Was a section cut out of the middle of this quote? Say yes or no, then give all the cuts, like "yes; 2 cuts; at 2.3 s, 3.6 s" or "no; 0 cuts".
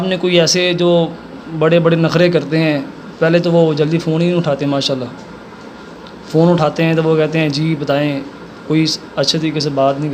no; 0 cuts